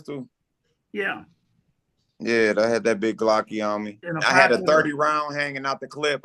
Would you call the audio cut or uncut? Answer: cut